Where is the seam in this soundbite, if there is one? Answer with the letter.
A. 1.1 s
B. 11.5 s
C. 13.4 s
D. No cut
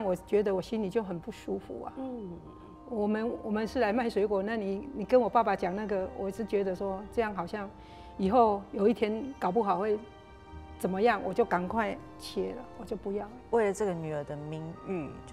C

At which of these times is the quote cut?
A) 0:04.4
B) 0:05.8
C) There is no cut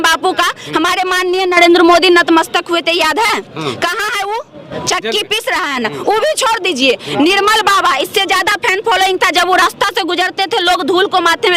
C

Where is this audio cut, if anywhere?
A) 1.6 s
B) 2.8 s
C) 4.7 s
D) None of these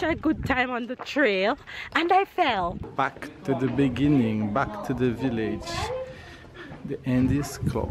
B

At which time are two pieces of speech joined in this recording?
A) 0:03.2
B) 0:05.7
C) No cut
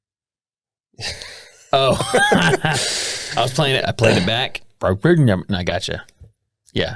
C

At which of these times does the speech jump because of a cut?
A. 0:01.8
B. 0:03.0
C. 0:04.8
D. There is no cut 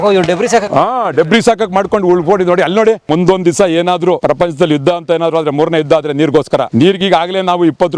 B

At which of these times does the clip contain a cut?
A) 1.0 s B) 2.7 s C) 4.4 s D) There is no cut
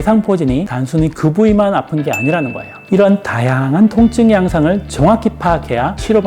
B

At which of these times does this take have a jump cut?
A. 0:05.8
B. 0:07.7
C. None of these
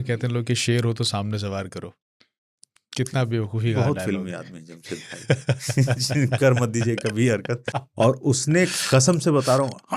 B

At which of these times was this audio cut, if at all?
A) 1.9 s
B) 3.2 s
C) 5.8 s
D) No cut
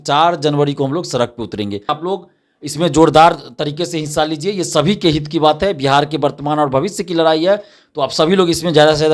A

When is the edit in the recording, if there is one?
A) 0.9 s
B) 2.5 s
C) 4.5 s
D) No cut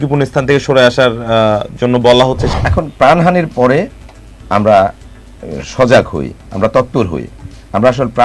B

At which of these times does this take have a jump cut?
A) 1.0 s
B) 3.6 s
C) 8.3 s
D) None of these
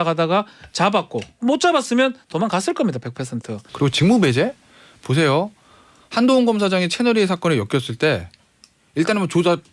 B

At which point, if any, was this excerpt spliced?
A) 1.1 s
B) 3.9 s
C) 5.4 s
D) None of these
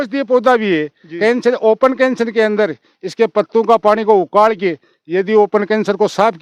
D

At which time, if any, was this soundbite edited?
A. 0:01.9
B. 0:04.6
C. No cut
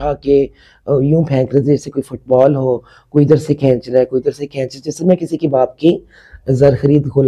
C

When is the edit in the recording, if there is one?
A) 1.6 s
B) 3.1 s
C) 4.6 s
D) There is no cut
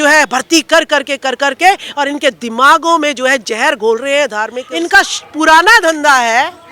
C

